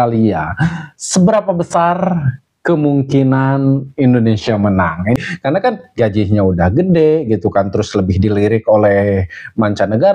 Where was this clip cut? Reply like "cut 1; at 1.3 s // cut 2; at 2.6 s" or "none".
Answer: cut 1; at 5.2 s